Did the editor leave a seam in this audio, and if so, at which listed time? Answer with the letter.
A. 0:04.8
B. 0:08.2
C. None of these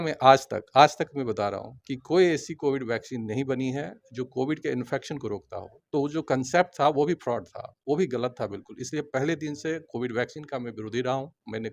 C